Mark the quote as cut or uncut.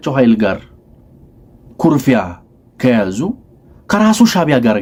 uncut